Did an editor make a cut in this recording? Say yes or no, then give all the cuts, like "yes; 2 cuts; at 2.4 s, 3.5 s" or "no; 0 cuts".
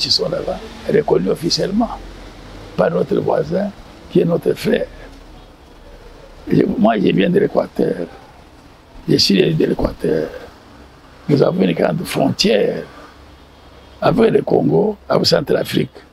no; 0 cuts